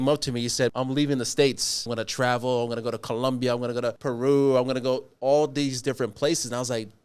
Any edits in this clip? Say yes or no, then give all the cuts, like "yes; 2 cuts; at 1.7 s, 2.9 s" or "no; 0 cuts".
yes; 3 cuts; at 0.7 s, 1.9 s, 4.0 s